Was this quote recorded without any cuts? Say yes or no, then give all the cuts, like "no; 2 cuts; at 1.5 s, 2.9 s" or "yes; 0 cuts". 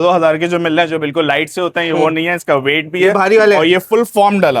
yes; 0 cuts